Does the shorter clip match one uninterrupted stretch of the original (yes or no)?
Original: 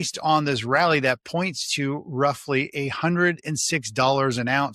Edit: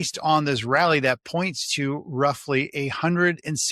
yes